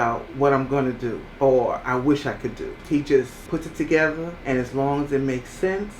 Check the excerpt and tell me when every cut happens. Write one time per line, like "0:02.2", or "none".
0:01.2
0:02.7
0:03.4
0:04.3